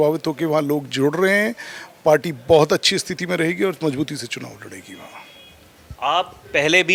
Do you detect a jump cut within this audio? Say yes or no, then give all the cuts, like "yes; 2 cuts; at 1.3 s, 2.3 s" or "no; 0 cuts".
no; 0 cuts